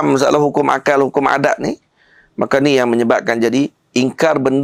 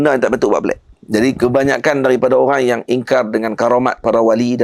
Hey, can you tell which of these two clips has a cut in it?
second; 1 cut; at 0.9 s

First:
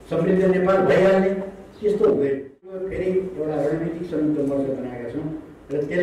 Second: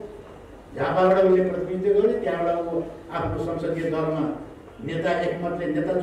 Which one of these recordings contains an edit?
first; 1 cut; at 2.9 s

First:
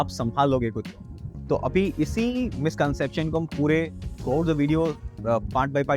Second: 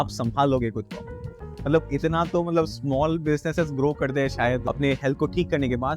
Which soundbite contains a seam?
second; 2 cuts; at 1.3 s, 4.6 s

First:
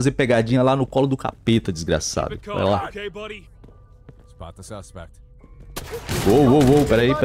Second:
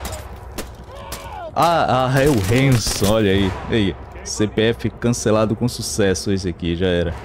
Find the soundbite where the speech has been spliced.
first; 1 cut; at 6.3 s

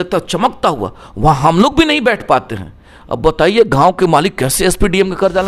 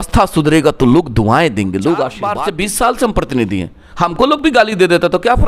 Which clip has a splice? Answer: second; 1 cut; at 2.3 s

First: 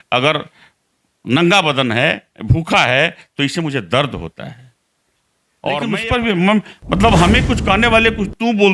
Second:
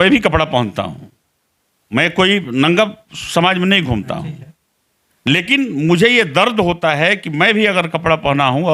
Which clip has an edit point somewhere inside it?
first; 1 cut; at 5.9 s

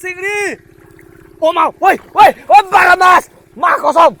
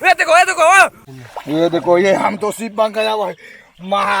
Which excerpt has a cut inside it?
second; 1 cut; at 1.0 s

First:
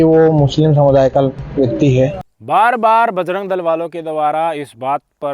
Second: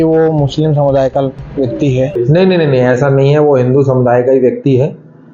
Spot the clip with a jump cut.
second; 1 cut; at 2.2 s

